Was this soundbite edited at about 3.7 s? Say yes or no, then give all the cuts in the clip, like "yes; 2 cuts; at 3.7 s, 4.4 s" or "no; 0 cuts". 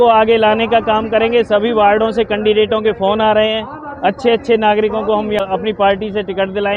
no; 1 cut; at 5.4 s